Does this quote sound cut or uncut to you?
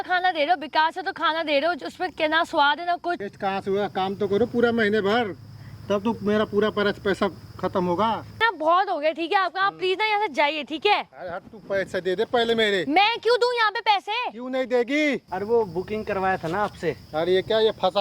cut